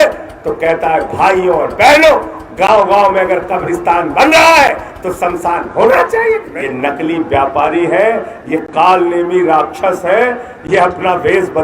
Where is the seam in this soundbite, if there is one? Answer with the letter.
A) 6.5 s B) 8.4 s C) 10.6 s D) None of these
A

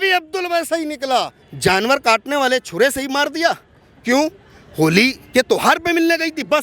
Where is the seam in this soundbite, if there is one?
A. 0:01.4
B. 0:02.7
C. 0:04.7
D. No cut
A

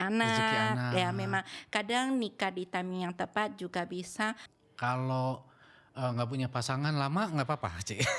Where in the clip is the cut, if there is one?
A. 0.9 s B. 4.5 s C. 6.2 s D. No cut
B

